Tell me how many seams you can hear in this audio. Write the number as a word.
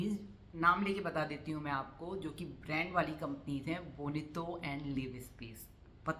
zero